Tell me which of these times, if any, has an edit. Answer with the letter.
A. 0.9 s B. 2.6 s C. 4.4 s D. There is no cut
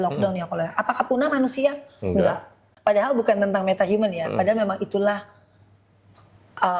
B